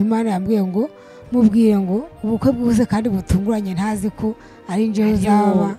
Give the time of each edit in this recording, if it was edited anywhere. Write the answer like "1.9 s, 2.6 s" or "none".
none